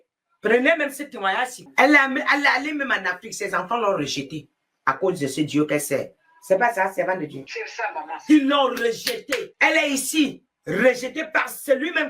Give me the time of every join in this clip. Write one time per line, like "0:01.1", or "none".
0:01.6